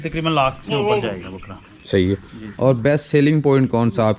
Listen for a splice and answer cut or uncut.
uncut